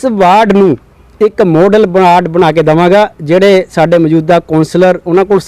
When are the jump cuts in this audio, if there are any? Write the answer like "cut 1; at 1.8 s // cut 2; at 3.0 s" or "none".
none